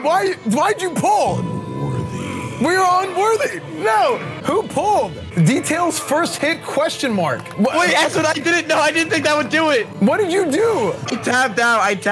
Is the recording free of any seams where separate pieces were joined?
yes; 0 cuts

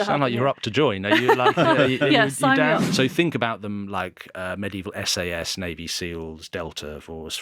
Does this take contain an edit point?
yes; 1 cut; at 2.9 s

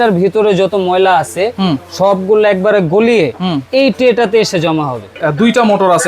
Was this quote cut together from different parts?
yes; 1 cut; at 5.1 s

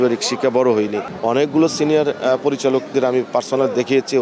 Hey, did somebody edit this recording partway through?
yes; 1 cut; at 1.1 s

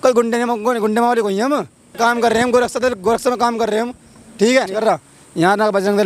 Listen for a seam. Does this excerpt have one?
yes; 2 cuts; at 2.0 s, 4.7 s

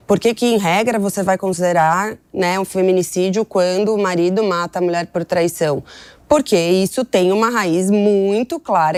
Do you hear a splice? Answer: no; 0 cuts

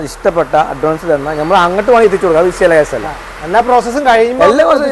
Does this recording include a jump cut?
no; 0 cuts

